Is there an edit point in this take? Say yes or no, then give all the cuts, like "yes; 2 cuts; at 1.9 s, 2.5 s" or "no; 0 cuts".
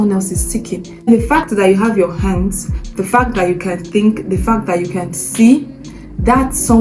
yes; 1 cut; at 1.1 s